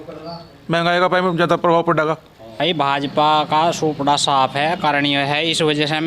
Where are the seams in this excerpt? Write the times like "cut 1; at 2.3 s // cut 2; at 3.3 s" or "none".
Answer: cut 1; at 2.6 s